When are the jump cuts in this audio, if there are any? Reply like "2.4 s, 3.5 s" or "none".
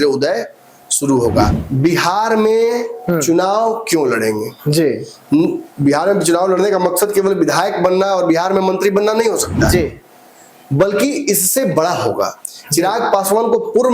1.5 s